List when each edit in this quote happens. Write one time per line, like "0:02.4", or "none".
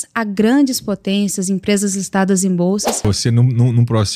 0:03.0